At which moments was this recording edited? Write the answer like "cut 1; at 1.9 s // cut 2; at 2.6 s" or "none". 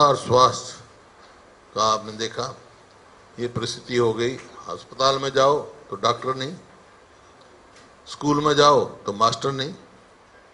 none